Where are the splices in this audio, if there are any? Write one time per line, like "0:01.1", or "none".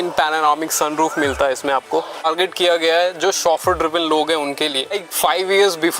0:02.2
0:05.1